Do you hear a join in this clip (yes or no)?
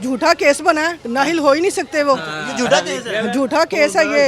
no